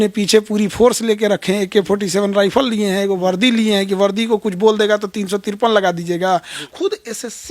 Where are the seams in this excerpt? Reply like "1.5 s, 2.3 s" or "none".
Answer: 6.6 s